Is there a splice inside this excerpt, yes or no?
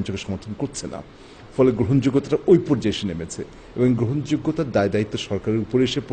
no